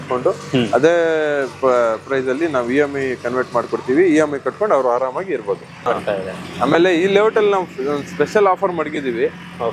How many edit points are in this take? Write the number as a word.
zero